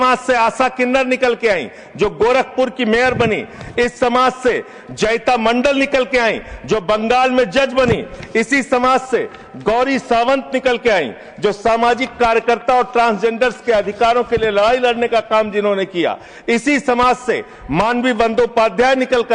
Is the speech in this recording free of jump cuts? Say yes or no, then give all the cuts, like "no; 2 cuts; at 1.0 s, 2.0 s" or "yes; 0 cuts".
yes; 0 cuts